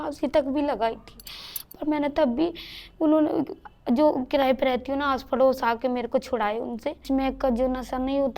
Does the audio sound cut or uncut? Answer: cut